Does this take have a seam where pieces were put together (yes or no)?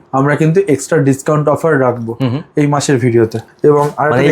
no